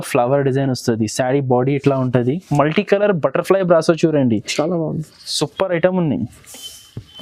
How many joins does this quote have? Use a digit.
1